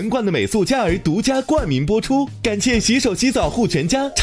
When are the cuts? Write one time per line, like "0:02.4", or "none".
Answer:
0:02.3